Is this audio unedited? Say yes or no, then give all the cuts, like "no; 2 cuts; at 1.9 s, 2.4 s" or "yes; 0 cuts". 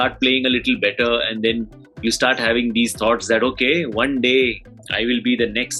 yes; 0 cuts